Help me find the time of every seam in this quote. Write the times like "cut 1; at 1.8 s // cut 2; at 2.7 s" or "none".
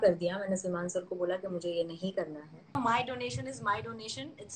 cut 1; at 2.8 s